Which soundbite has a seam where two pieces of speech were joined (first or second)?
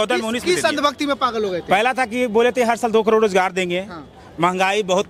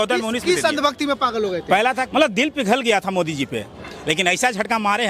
second